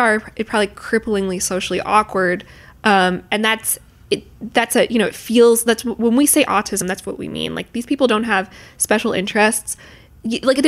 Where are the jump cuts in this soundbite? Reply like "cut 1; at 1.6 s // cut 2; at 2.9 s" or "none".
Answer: none